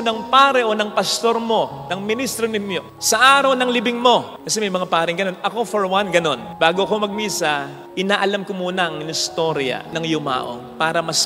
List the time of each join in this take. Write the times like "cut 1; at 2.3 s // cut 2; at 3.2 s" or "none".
none